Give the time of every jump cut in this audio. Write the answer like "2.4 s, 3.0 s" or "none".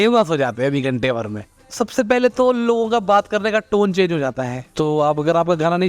1.5 s, 4.6 s